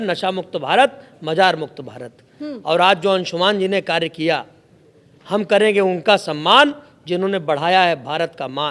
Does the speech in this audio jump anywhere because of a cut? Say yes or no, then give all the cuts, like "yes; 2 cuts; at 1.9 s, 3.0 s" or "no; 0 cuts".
no; 0 cuts